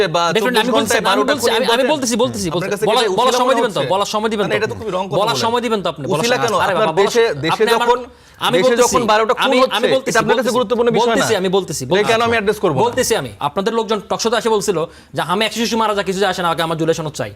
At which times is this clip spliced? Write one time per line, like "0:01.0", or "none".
0:13.3